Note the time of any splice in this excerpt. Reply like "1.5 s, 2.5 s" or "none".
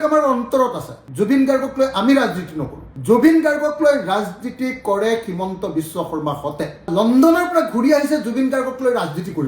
6.8 s